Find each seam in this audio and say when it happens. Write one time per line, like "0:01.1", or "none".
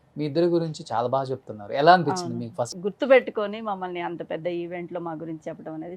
0:02.7